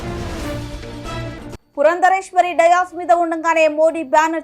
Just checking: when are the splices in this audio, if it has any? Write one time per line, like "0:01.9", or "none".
0:01.0